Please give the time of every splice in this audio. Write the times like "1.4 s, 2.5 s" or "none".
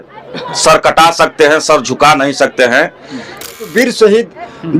3.7 s